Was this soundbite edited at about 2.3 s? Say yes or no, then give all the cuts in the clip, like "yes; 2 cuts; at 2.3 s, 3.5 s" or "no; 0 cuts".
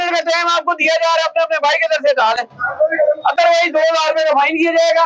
no; 0 cuts